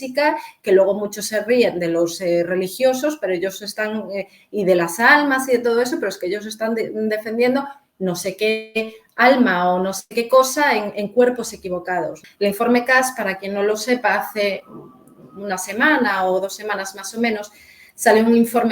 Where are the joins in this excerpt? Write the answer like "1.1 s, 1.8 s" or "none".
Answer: 12.2 s